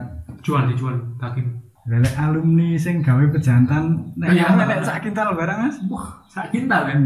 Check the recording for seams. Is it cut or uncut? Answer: uncut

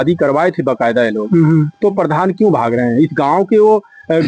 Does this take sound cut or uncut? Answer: uncut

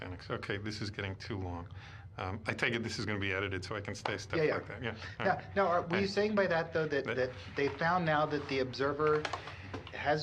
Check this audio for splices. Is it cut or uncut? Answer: cut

